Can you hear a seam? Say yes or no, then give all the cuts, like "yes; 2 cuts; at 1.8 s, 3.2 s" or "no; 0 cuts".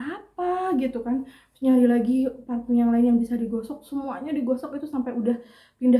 no; 0 cuts